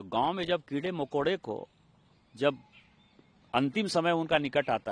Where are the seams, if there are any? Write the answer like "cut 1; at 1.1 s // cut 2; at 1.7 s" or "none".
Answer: none